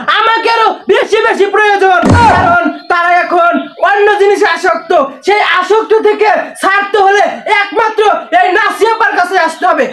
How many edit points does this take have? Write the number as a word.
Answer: zero